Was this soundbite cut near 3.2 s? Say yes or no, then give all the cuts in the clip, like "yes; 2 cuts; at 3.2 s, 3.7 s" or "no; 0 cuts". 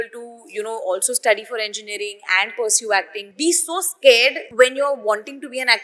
yes; 2 cuts; at 3.2 s, 4.4 s